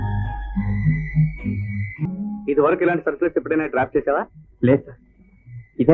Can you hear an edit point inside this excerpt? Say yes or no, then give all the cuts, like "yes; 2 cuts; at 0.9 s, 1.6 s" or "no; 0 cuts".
yes; 1 cut; at 2.0 s